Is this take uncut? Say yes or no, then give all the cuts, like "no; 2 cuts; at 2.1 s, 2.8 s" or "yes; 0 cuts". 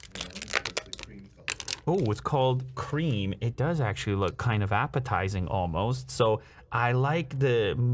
yes; 0 cuts